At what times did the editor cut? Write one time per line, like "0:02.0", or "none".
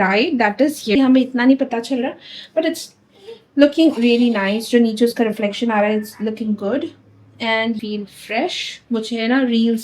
0:00.9
0:07.8